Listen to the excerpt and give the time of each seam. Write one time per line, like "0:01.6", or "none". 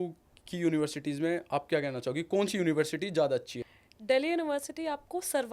0:03.6